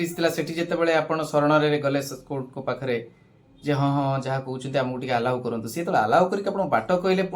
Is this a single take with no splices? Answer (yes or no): yes